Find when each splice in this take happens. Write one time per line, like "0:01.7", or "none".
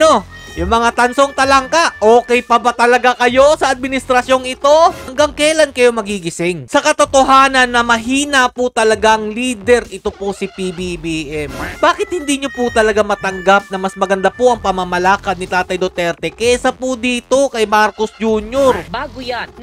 0:05.1
0:11.6
0:18.8